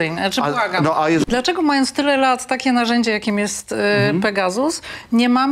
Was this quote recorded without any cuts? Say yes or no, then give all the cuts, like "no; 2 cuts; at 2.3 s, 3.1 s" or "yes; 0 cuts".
no; 1 cut; at 1.2 s